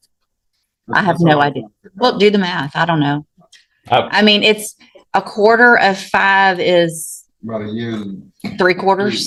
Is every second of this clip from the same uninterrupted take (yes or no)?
yes